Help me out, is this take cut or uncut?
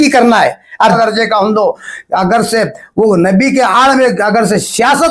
cut